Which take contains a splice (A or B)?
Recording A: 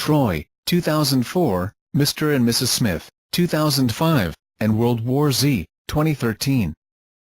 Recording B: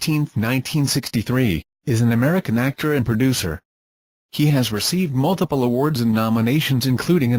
A